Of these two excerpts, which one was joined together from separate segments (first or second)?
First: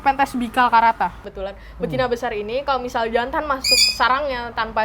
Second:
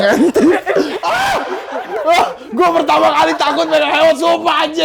first